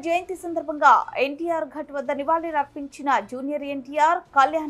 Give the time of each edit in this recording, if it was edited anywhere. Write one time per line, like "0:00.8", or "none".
none